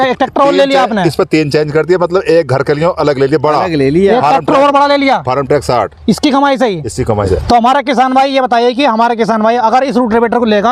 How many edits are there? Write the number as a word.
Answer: zero